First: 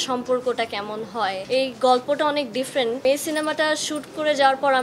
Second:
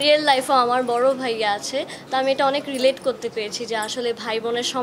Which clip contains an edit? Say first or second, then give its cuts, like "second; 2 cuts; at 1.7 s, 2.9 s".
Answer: first; 2 cuts; at 1.4 s, 3.0 s